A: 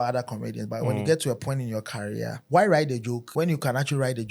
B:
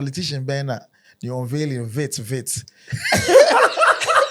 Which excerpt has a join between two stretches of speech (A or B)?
A